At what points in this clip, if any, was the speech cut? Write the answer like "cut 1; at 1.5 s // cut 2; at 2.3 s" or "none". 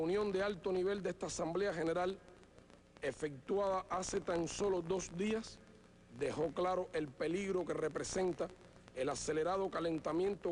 cut 1; at 6.3 s